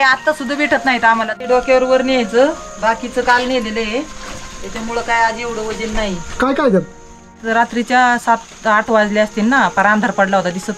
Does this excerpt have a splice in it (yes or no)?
yes